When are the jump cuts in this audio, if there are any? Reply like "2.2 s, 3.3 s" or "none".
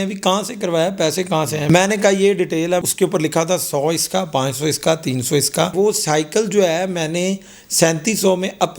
1.6 s, 2.8 s, 5.7 s

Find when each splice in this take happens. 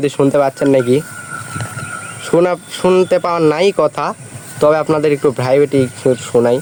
none

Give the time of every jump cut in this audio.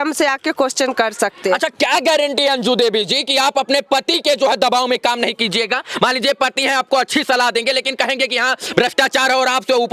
none

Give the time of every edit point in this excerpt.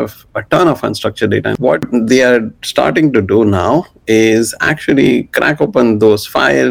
1.5 s

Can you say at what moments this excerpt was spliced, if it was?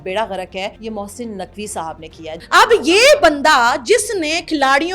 0.8 s, 2.4 s

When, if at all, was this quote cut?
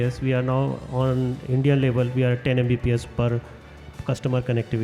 none

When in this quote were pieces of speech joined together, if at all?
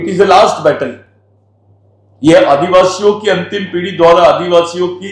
none

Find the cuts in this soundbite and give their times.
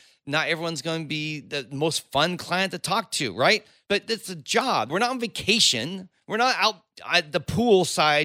3.7 s, 4.9 s, 6.9 s

